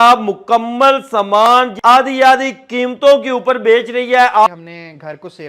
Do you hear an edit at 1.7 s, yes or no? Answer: yes